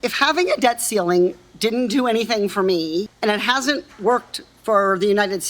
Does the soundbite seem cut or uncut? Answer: cut